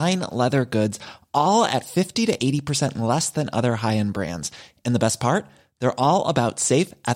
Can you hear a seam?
no; 0 cuts

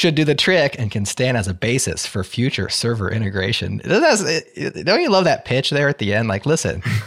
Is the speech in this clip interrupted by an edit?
no; 0 cuts

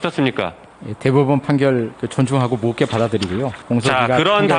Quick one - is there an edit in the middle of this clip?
yes; 1 cut; at 3.6 s

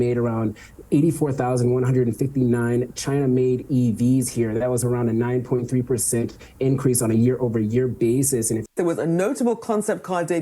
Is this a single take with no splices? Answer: no; 1 cut; at 8.6 s

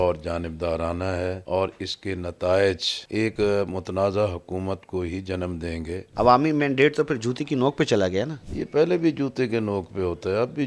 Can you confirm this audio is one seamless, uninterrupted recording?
no; 3 cuts; at 1.4 s, 3.3 s, 6.1 s

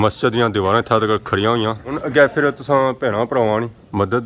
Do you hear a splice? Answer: no; 0 cuts

